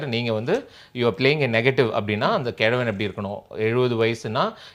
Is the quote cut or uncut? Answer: uncut